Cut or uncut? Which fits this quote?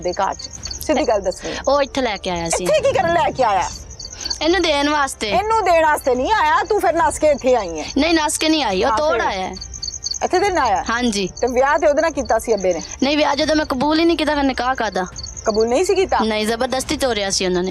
uncut